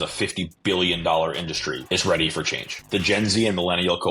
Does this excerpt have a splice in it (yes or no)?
yes